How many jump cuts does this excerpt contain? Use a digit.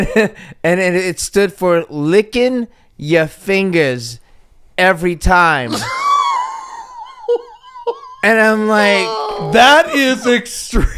0